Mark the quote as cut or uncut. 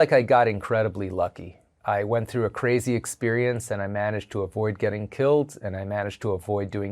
cut